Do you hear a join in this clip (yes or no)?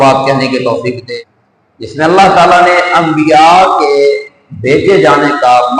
yes